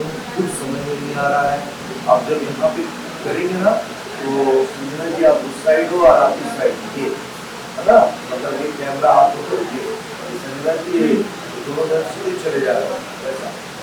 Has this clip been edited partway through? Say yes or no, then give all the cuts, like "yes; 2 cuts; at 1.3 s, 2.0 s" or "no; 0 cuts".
no; 0 cuts